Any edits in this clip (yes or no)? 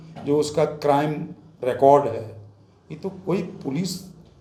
no